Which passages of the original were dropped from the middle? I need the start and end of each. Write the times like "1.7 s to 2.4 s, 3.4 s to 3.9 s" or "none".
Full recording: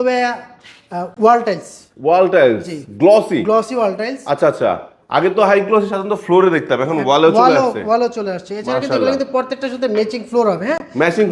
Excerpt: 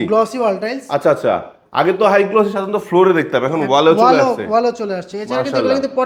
none